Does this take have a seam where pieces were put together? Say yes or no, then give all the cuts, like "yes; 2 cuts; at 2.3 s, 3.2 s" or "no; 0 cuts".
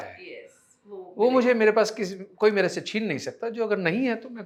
no; 0 cuts